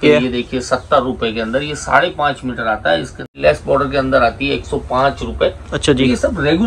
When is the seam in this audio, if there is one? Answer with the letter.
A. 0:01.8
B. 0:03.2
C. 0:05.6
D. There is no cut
B